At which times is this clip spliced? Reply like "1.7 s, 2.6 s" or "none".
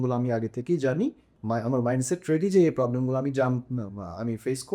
1.3 s